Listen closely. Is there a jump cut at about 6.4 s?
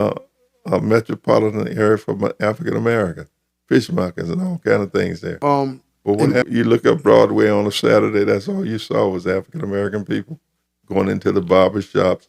yes; 1 cut; at 6.4 s

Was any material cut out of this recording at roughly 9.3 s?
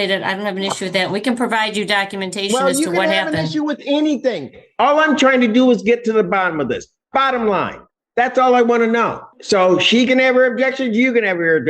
yes; 1 cut; at 9.3 s

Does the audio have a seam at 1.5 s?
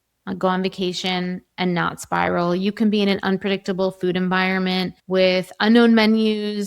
no; 1 cut; at 5.0 s

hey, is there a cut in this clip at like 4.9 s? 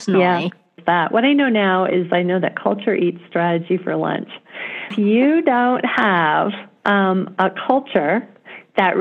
yes; 2 cuts; at 0.8 s, 4.9 s

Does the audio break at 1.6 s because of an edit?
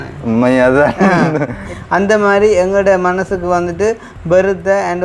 yes; 1 cut; at 1.6 s

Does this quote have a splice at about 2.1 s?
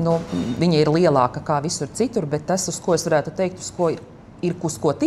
no; 0 cuts

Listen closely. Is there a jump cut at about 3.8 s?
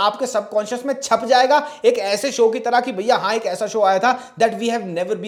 no; 0 cuts

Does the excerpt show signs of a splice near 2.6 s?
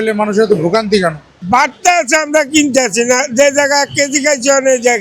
no; 1 cut; at 1.3 s

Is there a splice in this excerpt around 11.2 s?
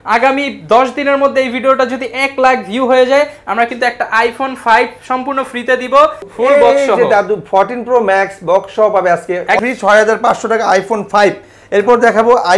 no; 2 cuts; at 6.3 s, 9.6 s

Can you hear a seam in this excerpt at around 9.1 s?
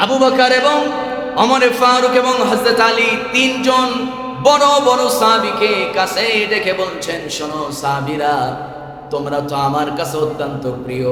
no; 0 cuts

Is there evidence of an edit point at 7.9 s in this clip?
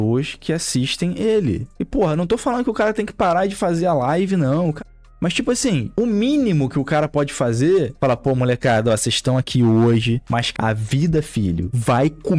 yes; 2 cuts; at 7.9 s, 10.5 s

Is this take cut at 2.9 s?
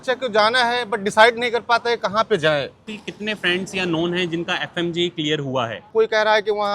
yes; 2 cuts; at 2.9 s, 5.9 s

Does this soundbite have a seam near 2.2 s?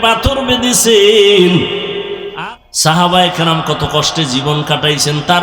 yes; 1 cut; at 2.2 s

